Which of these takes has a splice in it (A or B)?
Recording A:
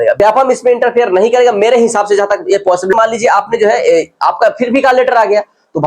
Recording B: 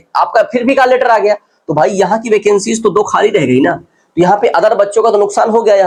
A